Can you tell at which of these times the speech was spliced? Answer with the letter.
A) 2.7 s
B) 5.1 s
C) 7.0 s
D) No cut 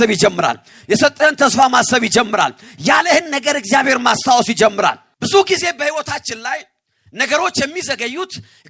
B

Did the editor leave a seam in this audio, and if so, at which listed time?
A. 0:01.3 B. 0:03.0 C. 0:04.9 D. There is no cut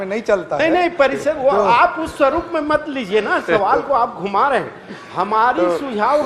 D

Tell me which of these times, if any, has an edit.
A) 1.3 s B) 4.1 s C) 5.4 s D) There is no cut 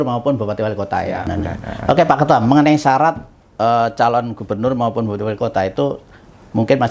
A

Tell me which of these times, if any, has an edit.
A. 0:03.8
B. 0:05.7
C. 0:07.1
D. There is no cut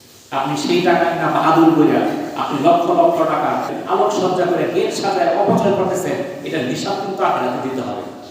A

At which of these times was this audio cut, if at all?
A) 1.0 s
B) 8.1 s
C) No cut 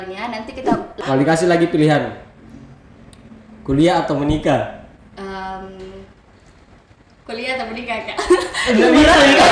A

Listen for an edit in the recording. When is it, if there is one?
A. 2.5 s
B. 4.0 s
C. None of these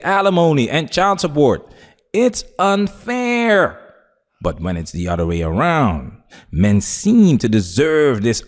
C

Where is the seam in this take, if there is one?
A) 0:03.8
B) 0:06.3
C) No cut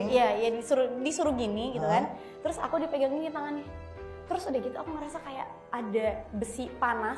B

